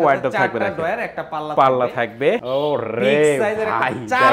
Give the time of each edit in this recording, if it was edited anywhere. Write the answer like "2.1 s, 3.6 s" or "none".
2.4 s

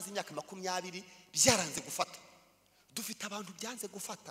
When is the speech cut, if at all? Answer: none

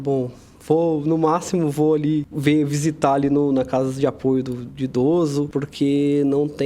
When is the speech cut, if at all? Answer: 2.3 s, 5.6 s

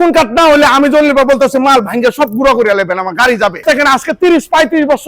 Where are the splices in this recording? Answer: 3.7 s

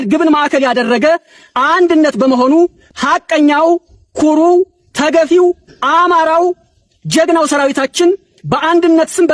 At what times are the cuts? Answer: none

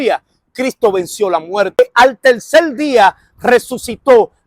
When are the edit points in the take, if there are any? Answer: 1.8 s

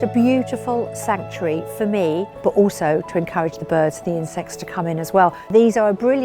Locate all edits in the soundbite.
2.3 s, 5.5 s

